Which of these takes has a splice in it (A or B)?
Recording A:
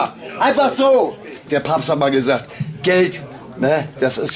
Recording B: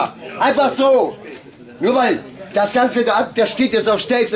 A